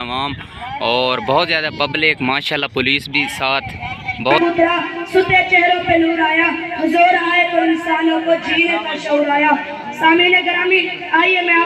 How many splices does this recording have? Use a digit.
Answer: 1